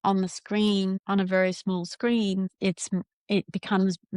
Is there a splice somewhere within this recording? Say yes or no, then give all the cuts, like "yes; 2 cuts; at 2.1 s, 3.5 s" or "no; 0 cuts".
yes; 2 cuts; at 1.0 s, 2.5 s